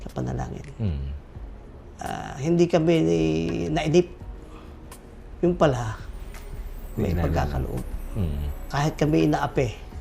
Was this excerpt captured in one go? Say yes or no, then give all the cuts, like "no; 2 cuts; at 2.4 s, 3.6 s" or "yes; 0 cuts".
no; 1 cut; at 8.7 s